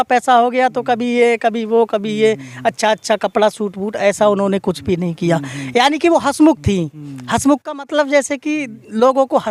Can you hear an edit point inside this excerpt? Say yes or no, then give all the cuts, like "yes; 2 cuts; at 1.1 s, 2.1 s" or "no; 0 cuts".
no; 0 cuts